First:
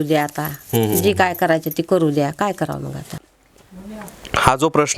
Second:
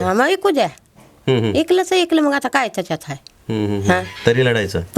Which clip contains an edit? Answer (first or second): first